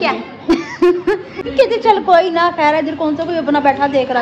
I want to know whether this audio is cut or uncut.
cut